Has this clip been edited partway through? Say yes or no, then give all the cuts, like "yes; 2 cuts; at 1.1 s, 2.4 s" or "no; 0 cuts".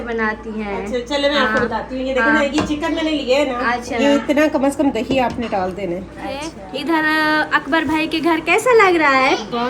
yes; 1 cut; at 6.5 s